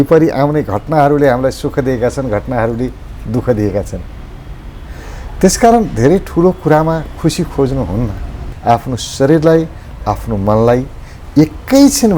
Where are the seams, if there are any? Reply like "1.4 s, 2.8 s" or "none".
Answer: 8.5 s